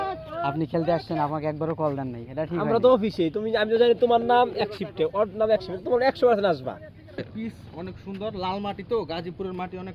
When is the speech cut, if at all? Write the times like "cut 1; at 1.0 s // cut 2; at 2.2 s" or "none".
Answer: cut 1; at 7.3 s